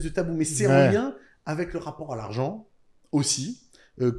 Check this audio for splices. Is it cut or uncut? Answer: uncut